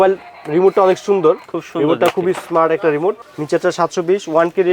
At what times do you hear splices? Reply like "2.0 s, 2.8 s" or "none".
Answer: 3.3 s